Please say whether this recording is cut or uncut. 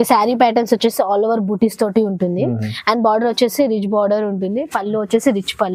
uncut